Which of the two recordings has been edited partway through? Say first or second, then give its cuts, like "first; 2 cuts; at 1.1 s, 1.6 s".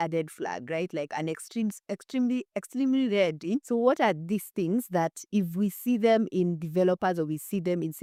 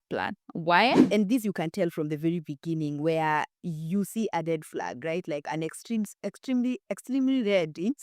second; 1 cut; at 1.0 s